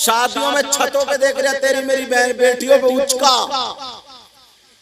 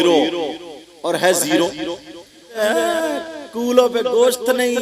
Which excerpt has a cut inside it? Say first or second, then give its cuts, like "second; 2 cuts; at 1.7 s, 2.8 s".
second; 1 cut; at 2.6 s